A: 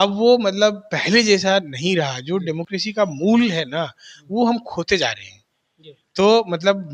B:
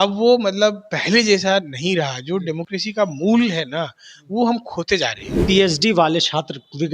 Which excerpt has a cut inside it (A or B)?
B